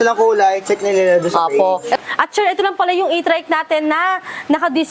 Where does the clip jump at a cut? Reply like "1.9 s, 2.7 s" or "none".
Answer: 2.0 s